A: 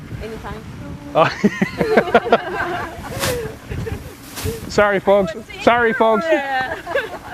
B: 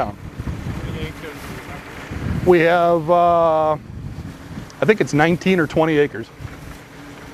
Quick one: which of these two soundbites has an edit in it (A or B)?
A